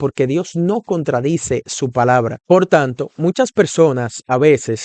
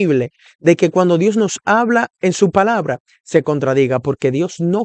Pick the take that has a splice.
first; 1 cut; at 2.4 s

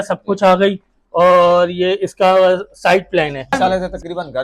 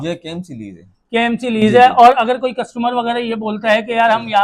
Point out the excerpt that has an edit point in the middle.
first; 1 cut; at 3.5 s

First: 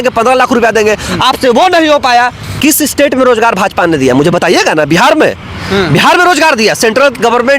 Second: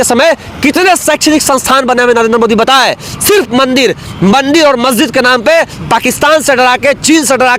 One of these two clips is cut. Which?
first; 1 cut; at 2.5 s

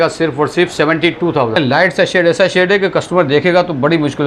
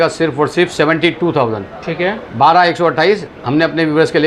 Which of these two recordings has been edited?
first; 1 cut; at 1.6 s

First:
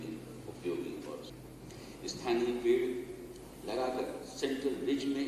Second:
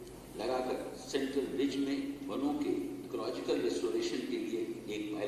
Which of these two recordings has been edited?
first; 1 cut; at 1.3 s

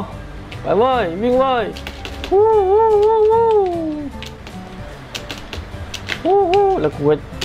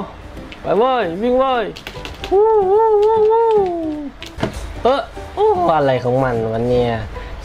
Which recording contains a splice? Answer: second; 1 cut; at 4.2 s

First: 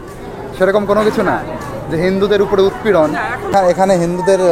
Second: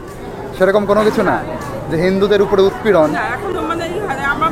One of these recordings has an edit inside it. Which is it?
first; 1 cut; at 3.5 s

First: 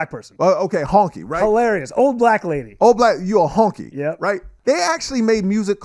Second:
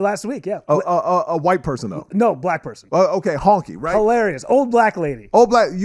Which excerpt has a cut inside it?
first; 1 cut; at 4.5 s

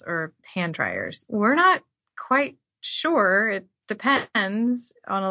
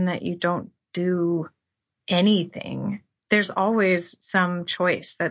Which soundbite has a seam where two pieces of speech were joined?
first; 1 cut; at 1.1 s

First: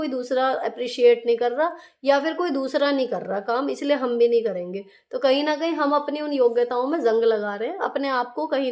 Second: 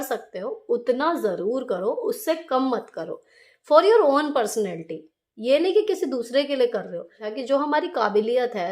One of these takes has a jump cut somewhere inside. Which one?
second; 1 cut; at 7.3 s

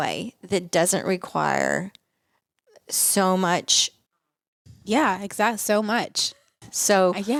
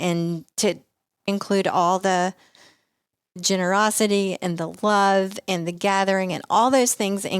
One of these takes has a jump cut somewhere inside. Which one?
second; 1 cut; at 1.3 s

